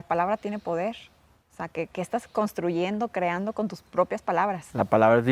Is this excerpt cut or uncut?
uncut